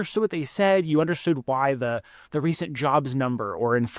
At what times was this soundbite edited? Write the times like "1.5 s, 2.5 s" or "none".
none

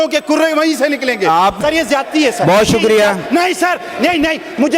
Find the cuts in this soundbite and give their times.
1.6 s

